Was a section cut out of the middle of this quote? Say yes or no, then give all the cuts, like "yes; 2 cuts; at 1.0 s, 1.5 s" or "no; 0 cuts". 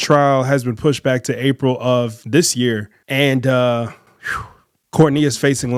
no; 0 cuts